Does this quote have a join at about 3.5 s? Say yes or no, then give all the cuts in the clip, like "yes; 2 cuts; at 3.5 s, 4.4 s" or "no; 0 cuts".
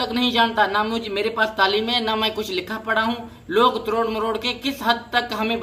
no; 0 cuts